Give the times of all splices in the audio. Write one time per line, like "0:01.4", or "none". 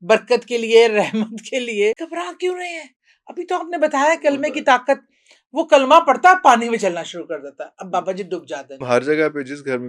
0:02.0
0:08.8